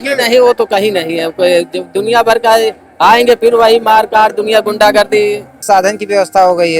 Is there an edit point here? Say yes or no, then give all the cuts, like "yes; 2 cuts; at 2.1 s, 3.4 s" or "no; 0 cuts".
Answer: yes; 1 cut; at 5.6 s